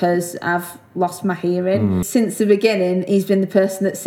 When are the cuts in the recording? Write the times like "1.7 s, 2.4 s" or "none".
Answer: 2.1 s